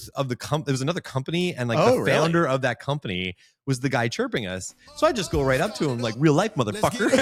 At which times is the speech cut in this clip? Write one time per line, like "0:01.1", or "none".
none